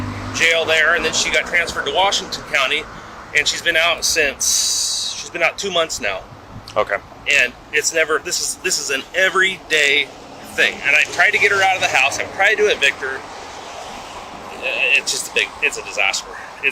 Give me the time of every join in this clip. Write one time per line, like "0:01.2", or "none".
none